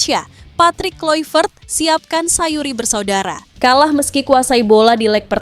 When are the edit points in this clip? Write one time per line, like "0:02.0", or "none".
0:03.5